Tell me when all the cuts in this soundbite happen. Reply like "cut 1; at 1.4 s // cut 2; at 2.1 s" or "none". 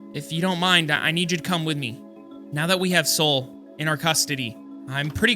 cut 1; at 2.1 s